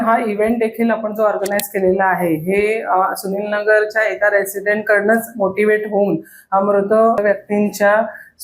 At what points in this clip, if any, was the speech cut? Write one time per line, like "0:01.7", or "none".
0:07.2